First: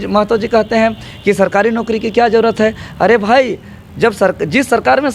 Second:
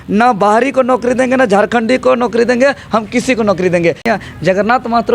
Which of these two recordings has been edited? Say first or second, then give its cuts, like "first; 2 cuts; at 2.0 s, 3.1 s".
second; 1 cut; at 4.1 s